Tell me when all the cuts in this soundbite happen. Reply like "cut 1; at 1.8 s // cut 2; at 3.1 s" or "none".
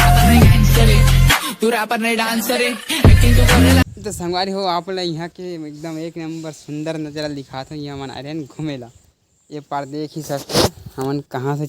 cut 1; at 3.8 s